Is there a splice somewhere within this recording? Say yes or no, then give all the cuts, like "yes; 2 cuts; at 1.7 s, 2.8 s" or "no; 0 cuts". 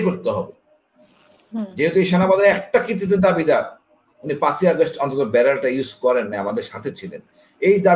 no; 0 cuts